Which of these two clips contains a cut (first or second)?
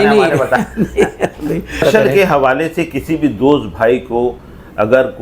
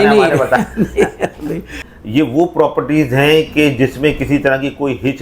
second